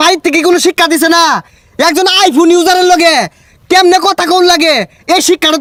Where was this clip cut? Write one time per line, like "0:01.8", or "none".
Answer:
none